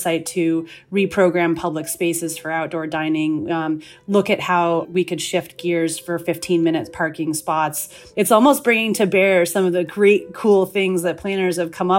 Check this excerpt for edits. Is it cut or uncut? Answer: cut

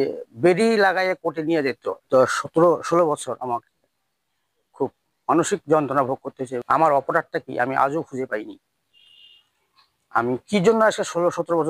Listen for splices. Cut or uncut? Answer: cut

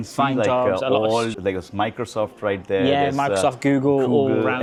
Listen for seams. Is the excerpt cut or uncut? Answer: uncut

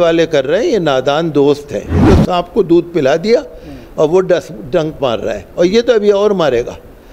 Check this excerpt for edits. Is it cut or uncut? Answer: cut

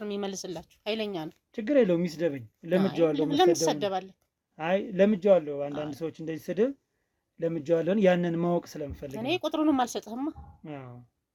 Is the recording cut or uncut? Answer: uncut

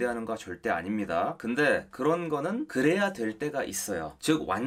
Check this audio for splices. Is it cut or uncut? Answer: cut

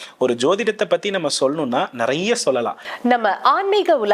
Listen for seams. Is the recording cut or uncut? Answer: cut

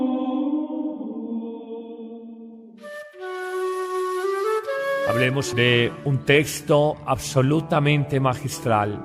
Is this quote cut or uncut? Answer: cut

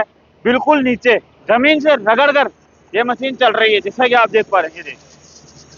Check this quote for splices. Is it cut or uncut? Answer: uncut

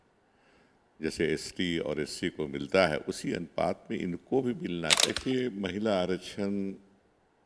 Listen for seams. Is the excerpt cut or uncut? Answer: cut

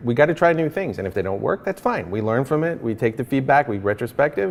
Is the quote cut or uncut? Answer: uncut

